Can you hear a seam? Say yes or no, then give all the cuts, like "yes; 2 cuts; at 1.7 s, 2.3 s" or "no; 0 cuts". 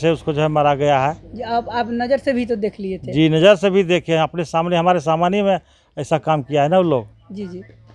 no; 0 cuts